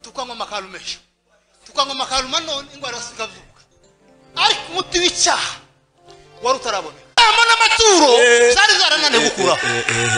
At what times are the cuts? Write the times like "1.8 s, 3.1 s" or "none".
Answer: 7.2 s